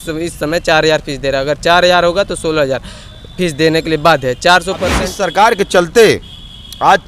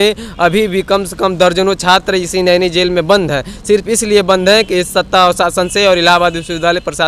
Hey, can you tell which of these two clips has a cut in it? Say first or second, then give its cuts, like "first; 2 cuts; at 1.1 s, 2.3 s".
first; 1 cut; at 5.0 s